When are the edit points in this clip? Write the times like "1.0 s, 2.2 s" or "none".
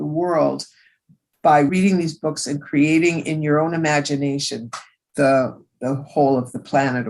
1.7 s